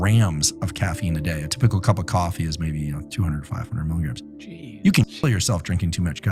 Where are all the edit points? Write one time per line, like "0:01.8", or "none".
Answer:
none